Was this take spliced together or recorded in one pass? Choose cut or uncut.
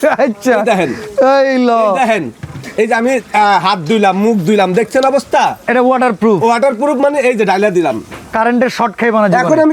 uncut